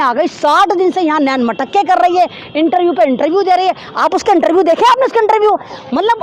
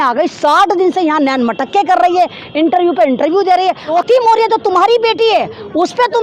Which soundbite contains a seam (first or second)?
second